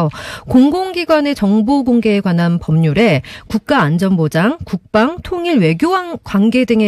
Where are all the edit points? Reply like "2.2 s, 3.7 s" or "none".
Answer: 2.2 s